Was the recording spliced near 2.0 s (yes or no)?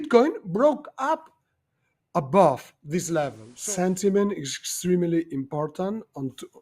no